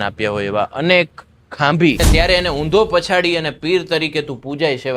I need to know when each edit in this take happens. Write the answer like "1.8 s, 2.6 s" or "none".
2.0 s